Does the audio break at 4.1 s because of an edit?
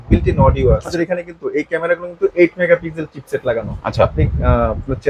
no; 1 cut; at 0.9 s

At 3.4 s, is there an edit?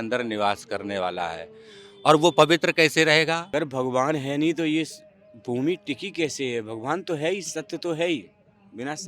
yes; 1 cut; at 3.4 s

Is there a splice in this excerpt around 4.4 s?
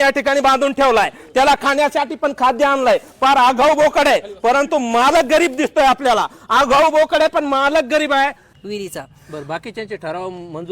no; 1 cut; at 8.5 s

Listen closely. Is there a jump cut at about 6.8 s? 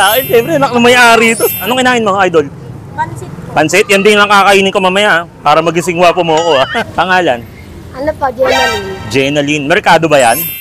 yes; 2 cuts; at 1.7 s, 6.8 s

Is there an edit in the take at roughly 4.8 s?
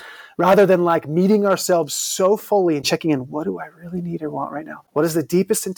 yes; 1 cut; at 4.8 s

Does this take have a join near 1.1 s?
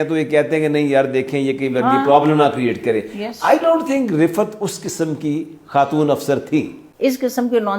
no; 1 cut; at 6.8 s

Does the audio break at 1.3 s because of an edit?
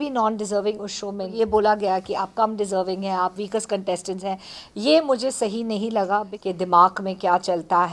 yes; 2 cuts; at 1.3 s, 6.3 s

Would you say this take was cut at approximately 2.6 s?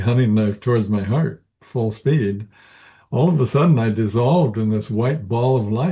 no; 0 cuts

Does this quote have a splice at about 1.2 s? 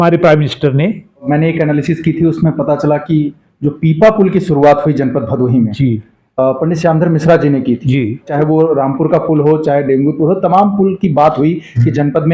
yes; 2 cuts; at 1.2 s, 8.3 s

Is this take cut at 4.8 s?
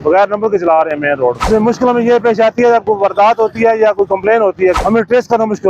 yes; 2 cuts; at 1.5 s, 4.8 s

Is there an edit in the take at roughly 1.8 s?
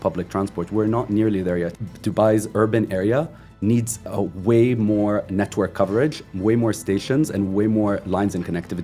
yes; 1 cut; at 1.8 s

